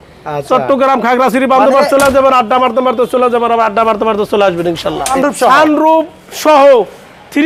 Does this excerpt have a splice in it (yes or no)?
yes